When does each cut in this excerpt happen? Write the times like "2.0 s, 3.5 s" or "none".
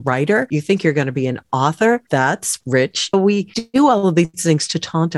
2.0 s, 3.2 s